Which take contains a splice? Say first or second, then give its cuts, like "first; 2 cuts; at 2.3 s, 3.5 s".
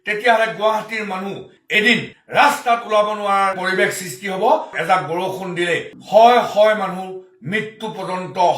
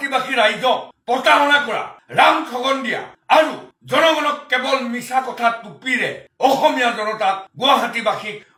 first; 1 cut; at 4.7 s